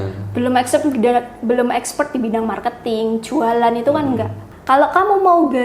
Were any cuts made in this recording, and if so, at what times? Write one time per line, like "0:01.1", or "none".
0:04.5